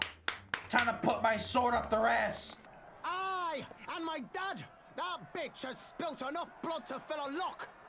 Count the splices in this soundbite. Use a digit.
1